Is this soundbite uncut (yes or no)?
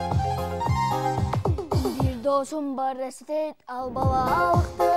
no